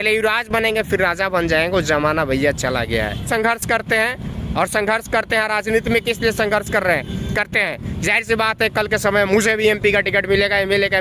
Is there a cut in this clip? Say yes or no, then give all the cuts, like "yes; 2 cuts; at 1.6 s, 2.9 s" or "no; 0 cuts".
yes; 1 cut; at 3.3 s